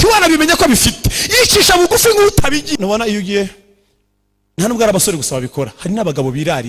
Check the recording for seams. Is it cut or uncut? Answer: cut